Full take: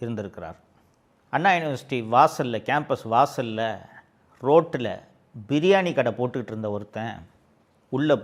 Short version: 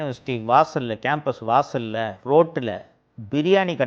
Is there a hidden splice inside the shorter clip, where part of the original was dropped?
yes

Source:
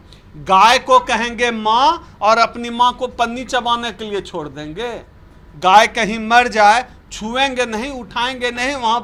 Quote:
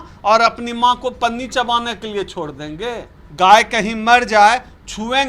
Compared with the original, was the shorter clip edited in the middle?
yes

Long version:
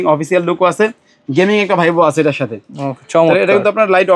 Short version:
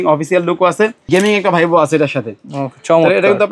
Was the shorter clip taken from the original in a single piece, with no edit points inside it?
no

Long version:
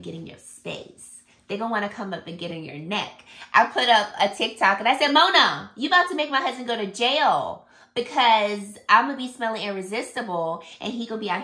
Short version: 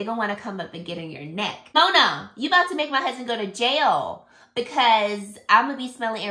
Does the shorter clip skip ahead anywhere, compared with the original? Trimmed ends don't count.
yes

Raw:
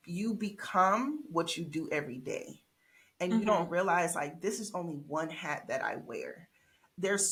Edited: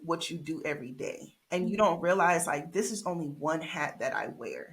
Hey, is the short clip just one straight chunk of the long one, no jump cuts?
no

